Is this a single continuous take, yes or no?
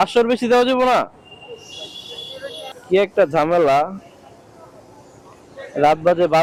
yes